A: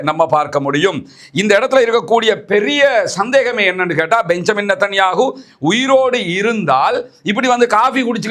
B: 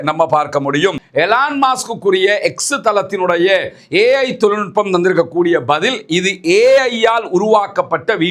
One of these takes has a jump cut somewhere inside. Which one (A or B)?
B